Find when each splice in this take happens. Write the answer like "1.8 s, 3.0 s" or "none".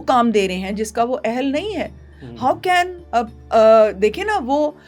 none